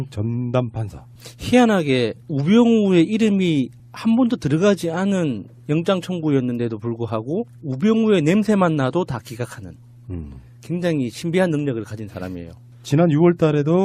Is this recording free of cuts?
no; 1 cut; at 12.8 s

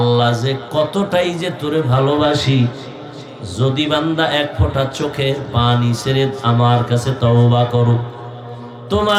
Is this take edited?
no; 0 cuts

